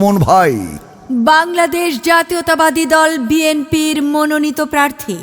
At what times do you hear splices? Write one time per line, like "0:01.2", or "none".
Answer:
0:01.0